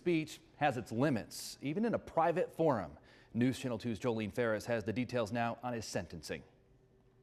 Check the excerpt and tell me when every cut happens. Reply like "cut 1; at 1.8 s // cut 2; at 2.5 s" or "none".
none

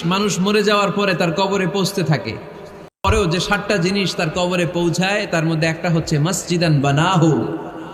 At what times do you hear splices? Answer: cut 1; at 3.1 s

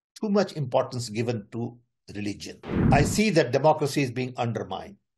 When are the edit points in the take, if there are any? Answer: cut 1; at 2.7 s

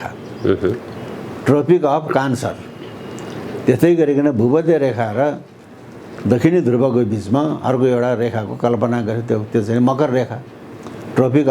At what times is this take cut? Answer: none

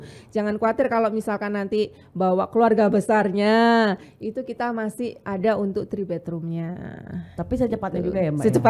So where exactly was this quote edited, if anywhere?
none

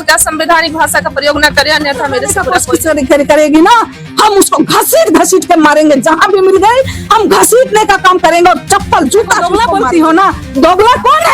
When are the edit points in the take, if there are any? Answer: cut 1; at 2.5 s // cut 2; at 9.4 s

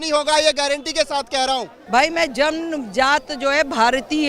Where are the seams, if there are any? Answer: cut 1; at 1.7 s

